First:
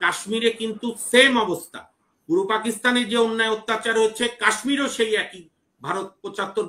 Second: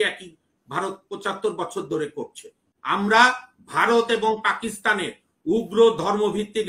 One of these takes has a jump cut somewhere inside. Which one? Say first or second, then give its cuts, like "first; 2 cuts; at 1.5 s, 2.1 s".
second; 1 cut; at 2.7 s